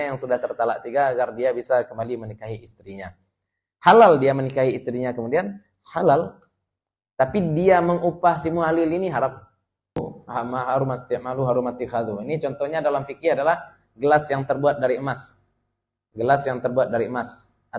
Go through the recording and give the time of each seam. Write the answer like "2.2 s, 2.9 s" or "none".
10.0 s